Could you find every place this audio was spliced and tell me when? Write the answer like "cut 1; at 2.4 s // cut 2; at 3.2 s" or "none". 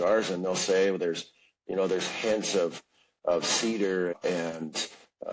cut 1; at 4.1 s